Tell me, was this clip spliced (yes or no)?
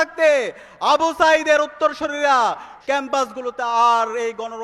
yes